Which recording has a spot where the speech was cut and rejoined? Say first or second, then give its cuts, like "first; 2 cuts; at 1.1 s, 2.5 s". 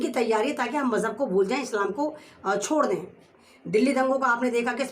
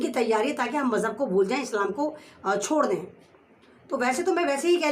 first; 1 cut; at 3.5 s